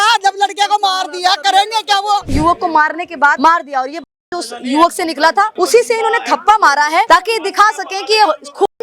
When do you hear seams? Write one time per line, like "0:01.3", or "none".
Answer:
0:02.3
0:03.4
0:05.5
0:07.1